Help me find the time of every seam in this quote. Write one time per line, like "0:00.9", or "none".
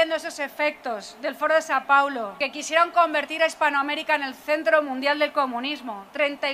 0:02.4